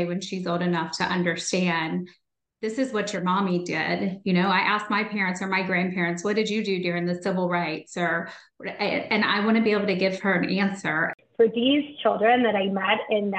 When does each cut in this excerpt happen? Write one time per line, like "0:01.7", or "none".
0:11.1